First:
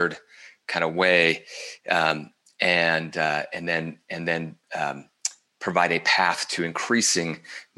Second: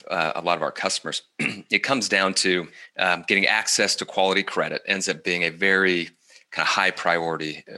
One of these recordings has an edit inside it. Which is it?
second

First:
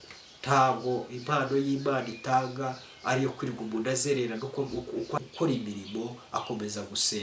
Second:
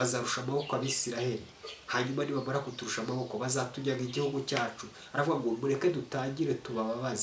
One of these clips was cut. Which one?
first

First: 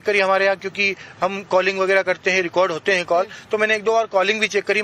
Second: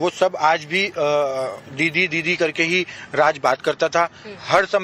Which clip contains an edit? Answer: first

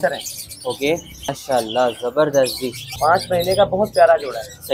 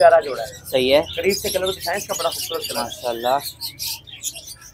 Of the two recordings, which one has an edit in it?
first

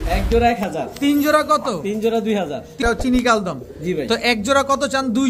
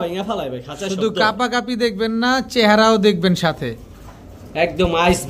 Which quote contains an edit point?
first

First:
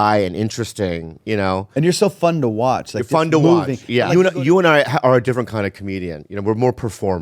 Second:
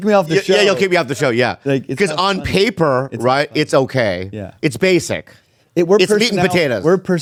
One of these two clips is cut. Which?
first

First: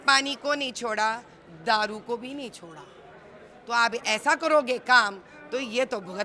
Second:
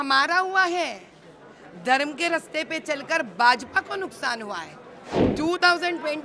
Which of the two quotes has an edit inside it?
second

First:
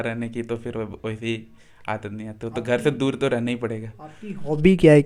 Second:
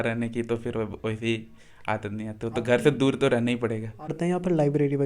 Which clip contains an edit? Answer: second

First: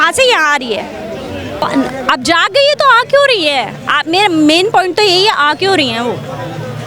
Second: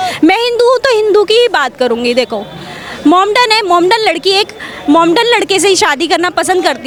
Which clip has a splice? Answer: first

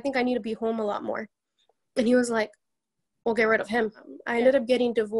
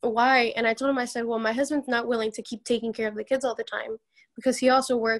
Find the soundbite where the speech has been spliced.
first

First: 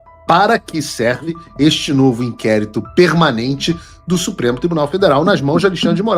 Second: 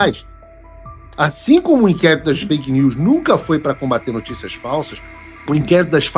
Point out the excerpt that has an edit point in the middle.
second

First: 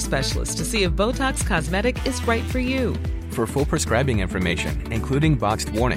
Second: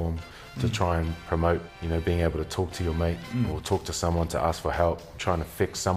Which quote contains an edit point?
second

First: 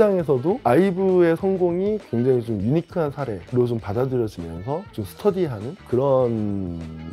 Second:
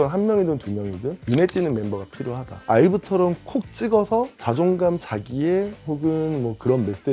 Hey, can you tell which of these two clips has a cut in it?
second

